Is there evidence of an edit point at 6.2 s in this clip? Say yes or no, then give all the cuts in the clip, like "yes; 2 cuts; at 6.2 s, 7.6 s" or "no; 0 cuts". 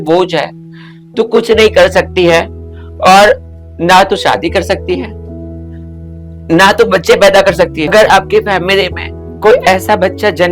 no; 1 cut; at 7.9 s